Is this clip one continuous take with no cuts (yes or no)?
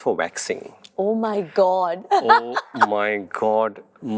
yes